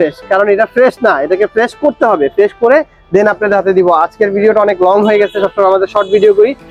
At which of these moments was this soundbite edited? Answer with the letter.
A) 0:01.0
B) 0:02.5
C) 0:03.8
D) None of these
D